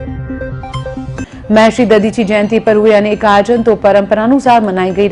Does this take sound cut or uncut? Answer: cut